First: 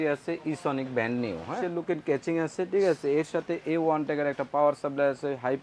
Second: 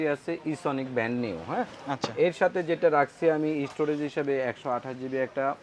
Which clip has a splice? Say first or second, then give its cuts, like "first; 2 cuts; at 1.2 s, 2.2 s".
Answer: first; 1 cut; at 1.6 s